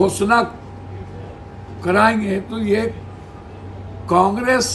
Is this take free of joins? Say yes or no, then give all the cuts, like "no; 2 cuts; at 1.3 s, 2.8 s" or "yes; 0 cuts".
yes; 0 cuts